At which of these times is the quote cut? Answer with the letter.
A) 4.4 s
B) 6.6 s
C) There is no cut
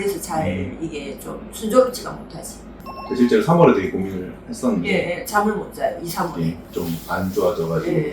B